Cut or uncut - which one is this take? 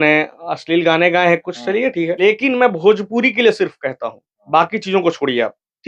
cut